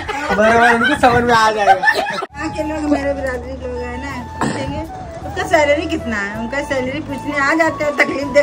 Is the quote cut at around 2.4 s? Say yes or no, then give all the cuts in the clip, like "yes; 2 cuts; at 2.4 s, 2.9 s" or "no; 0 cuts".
yes; 1 cut; at 2.4 s